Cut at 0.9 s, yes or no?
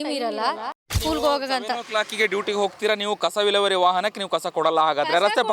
yes